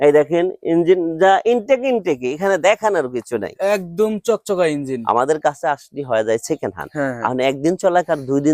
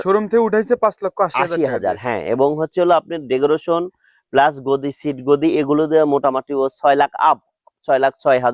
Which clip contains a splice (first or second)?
first